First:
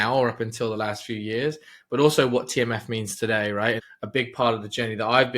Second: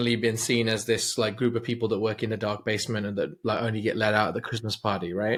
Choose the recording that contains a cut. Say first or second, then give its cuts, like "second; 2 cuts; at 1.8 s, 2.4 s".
first; 1 cut; at 3.9 s